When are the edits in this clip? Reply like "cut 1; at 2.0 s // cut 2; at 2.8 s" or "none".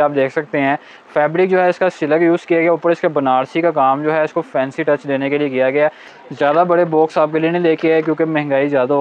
cut 1; at 6.1 s